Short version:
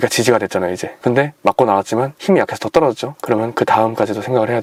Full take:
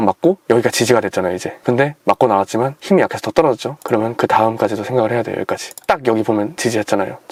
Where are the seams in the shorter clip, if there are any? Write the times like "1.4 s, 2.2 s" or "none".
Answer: none